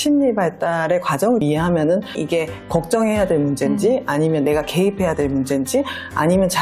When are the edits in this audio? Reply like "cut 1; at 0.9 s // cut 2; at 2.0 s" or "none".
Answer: none